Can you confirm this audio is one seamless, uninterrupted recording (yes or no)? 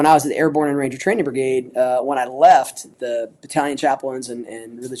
no